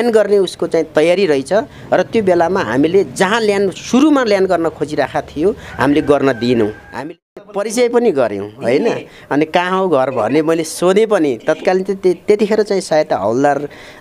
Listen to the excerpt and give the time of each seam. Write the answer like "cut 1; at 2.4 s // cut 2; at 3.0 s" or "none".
cut 1; at 7.2 s